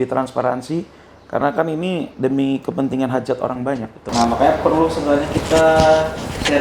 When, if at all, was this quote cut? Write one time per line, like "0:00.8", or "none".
0:04.0